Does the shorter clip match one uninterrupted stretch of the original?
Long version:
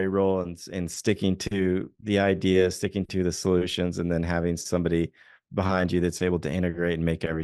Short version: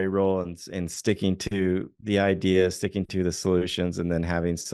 yes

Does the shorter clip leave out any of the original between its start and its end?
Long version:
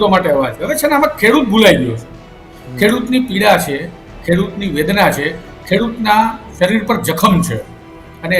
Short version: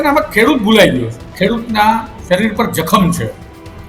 yes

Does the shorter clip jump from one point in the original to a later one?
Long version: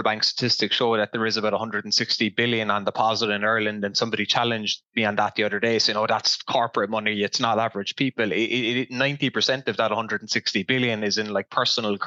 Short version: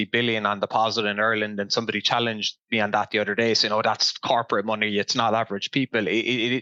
no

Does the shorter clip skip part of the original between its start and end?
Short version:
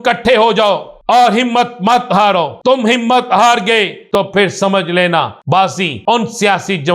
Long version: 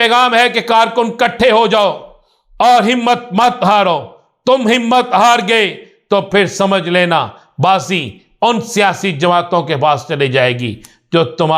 yes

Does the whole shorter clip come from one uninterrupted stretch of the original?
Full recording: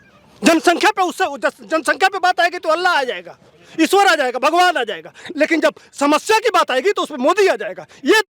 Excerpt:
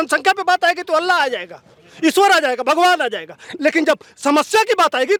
yes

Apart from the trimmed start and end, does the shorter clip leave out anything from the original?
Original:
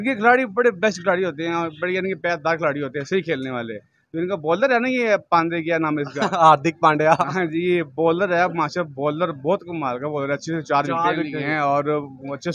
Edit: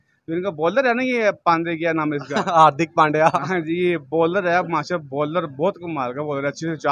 no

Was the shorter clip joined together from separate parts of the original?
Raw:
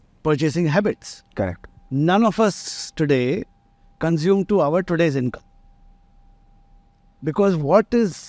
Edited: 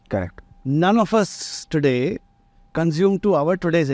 no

